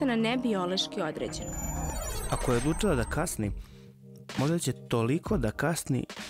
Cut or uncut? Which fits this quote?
cut